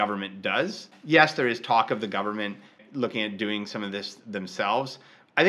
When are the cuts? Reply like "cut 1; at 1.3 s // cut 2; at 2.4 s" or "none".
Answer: cut 1; at 0.9 s // cut 2; at 2.8 s